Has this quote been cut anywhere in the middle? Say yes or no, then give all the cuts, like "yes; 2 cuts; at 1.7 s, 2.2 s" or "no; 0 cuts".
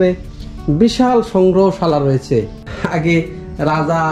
yes; 1 cut; at 2.7 s